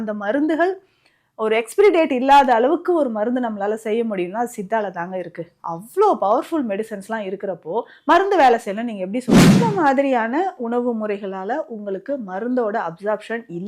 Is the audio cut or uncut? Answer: cut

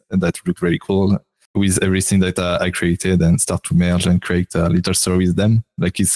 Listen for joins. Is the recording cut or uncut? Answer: cut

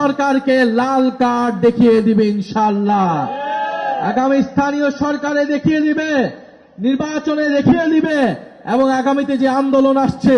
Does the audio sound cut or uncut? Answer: uncut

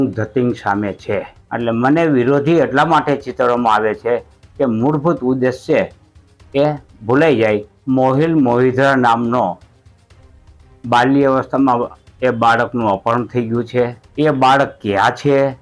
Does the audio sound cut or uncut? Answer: cut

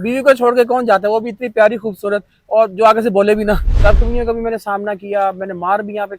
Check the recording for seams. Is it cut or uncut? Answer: cut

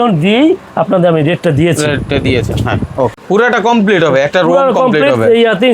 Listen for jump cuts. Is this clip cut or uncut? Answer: cut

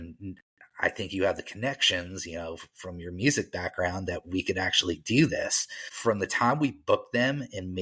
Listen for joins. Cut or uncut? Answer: cut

